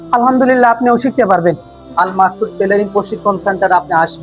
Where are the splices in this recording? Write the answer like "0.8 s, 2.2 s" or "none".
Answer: 1.8 s